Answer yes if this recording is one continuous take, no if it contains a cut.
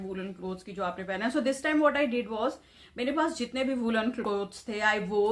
yes